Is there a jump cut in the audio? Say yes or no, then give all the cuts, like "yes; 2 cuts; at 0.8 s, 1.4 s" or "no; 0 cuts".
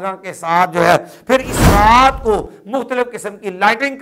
no; 0 cuts